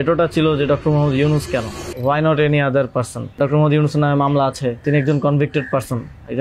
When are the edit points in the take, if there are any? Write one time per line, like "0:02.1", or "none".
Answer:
0:01.8
0:03.4
0:04.8